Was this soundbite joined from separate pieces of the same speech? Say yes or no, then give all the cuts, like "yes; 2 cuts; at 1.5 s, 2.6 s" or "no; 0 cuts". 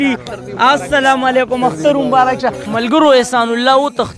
yes; 1 cut; at 2.6 s